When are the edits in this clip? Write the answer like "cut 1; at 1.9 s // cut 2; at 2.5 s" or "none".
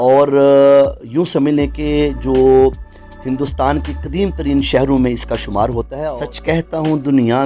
cut 1; at 5.9 s